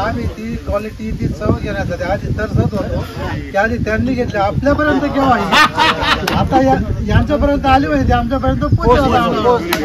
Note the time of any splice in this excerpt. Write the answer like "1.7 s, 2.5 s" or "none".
none